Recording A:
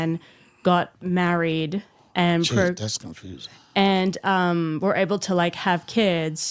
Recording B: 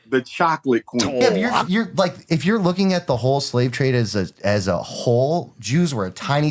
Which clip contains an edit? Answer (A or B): B